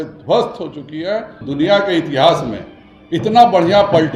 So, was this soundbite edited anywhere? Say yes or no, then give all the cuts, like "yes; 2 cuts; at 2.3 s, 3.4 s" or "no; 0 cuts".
yes; 1 cut; at 1.4 s